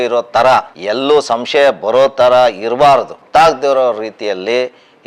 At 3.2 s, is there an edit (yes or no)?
yes